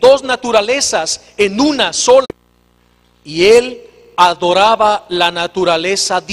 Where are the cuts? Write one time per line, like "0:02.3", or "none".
none